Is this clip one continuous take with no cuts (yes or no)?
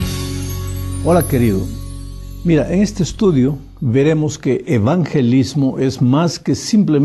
yes